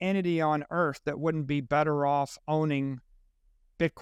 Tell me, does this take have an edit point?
no; 0 cuts

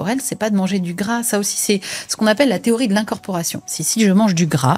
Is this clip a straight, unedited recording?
yes; 0 cuts

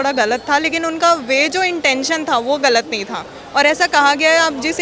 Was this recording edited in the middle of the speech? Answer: no; 0 cuts

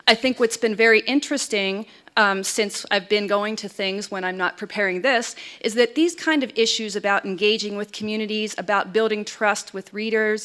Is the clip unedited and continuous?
yes; 0 cuts

